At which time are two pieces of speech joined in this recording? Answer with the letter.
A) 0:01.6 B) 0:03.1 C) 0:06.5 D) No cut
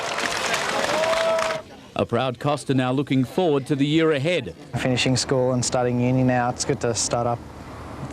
A